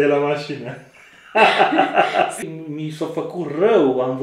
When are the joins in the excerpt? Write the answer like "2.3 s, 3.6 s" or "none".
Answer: 2.4 s